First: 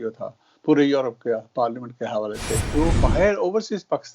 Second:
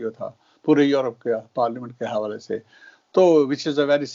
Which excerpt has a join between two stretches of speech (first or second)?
first